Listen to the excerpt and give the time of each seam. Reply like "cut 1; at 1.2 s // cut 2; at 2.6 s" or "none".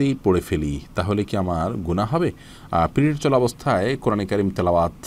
none